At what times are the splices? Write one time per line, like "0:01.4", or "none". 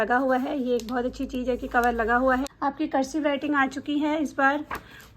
0:02.5